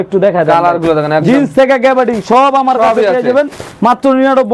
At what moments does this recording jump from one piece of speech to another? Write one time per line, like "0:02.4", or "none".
none